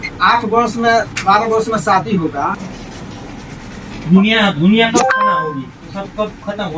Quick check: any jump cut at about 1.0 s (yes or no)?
no